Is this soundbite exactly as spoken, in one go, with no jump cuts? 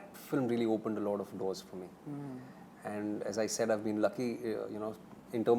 yes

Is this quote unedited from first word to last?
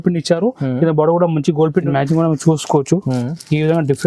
no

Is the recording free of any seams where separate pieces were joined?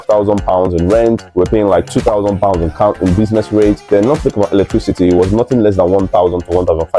yes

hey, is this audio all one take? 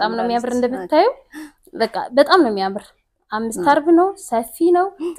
yes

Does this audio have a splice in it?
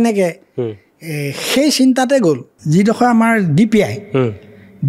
yes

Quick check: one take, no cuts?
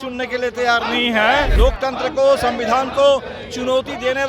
no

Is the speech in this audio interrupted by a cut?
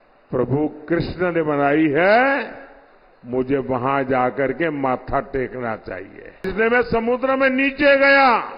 yes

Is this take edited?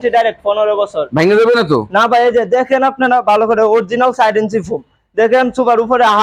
no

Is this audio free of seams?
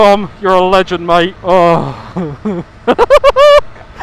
no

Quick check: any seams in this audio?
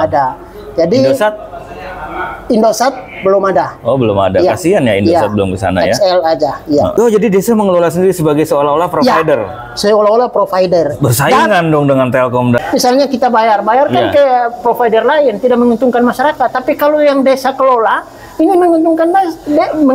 yes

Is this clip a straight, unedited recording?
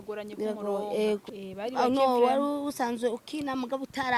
no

